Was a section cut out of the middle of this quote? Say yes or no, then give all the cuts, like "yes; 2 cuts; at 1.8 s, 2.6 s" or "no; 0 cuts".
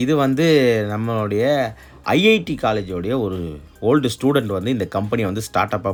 no; 0 cuts